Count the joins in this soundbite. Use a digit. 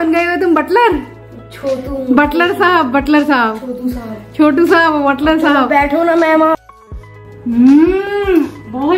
1